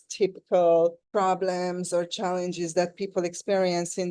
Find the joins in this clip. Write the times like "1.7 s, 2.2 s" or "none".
none